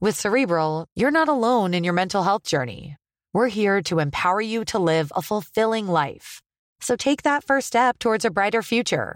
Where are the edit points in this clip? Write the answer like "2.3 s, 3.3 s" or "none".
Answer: none